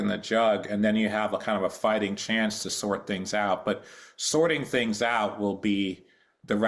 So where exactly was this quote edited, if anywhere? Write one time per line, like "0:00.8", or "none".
none